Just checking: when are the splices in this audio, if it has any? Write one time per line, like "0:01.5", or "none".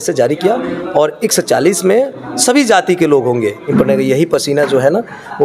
0:03.7